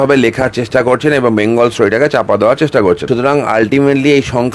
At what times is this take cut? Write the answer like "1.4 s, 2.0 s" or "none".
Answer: 3.0 s

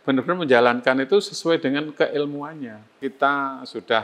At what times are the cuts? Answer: 3.0 s

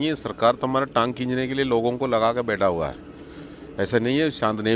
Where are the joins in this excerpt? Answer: none

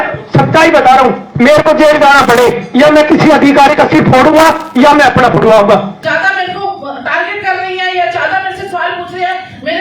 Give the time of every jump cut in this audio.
5.9 s

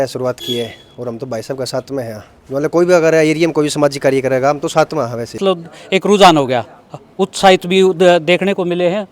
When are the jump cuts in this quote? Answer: 5.4 s

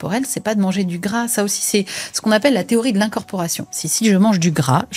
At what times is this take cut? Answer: none

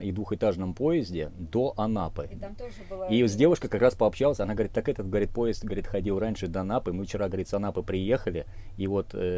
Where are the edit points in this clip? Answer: none

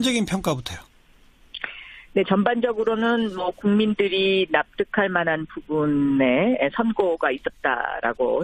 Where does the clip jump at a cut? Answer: none

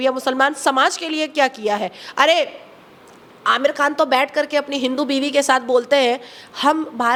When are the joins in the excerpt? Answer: none

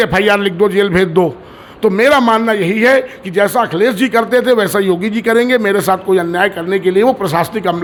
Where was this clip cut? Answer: none

